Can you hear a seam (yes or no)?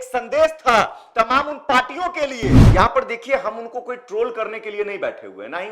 yes